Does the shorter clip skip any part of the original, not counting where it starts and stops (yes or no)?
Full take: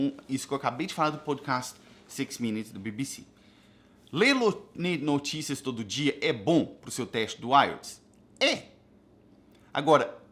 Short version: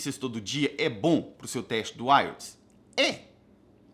no